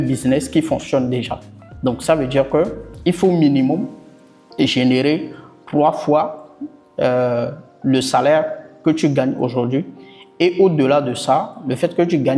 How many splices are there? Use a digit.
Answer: 0